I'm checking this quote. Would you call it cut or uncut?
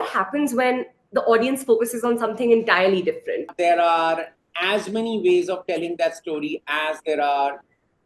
cut